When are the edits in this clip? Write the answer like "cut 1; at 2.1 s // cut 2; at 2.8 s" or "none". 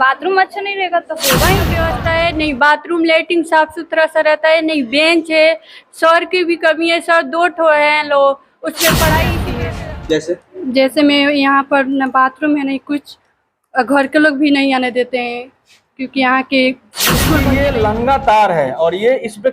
cut 1; at 1.8 s // cut 2; at 9.4 s // cut 3; at 17.4 s